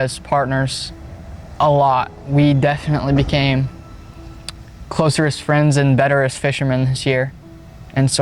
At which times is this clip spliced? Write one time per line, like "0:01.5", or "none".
none